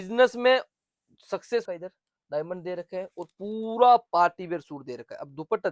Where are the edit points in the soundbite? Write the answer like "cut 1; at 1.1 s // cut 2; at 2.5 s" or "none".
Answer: cut 1; at 1.6 s